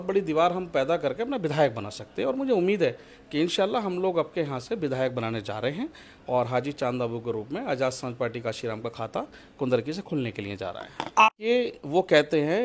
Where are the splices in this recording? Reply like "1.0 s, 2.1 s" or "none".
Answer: 11.3 s